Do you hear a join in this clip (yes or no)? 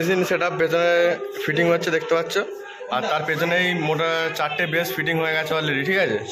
no